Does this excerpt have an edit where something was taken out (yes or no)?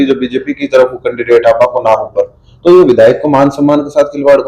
no